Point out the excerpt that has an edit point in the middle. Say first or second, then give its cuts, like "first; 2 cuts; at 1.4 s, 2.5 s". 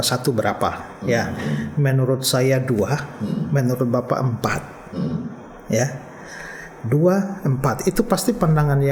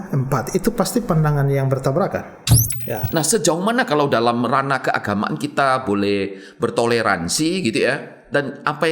second; 1 cut; at 2.7 s